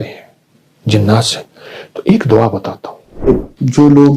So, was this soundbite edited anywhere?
yes; 1 cut; at 3.3 s

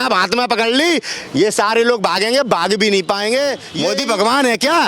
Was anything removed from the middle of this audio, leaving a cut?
yes; 1 cut; at 3.7 s

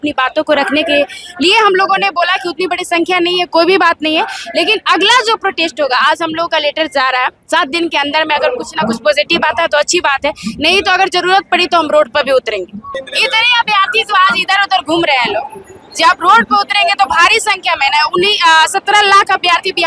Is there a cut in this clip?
yes; 1 cut; at 13.0 s

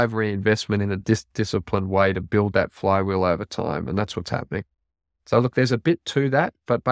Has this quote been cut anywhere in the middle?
no; 0 cuts

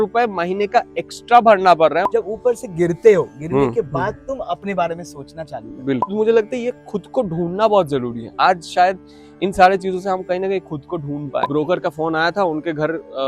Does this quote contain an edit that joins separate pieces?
yes; 3 cuts; at 2.0 s, 6.1 s, 11.5 s

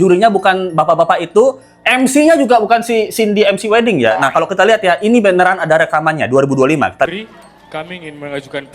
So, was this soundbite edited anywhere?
yes; 1 cut; at 7.1 s

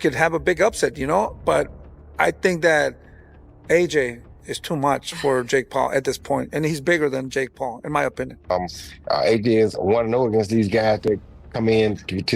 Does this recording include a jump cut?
yes; 1 cut; at 8.5 s

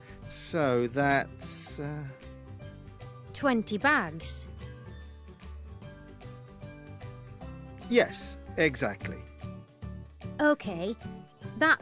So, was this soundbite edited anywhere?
no; 0 cuts

